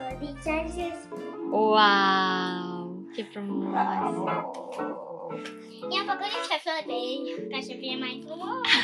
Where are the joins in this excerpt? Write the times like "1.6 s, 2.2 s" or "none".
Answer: 1.2 s